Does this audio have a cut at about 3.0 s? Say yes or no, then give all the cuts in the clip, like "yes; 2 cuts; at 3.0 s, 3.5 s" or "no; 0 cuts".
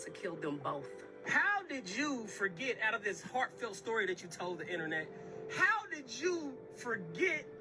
no; 1 cut; at 1.3 s